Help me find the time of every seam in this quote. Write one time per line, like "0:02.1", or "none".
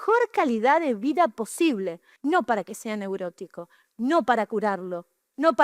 0:02.0